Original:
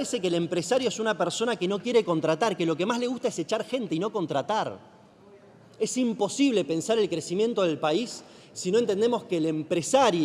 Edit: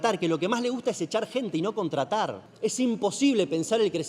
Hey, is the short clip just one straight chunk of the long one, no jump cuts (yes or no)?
no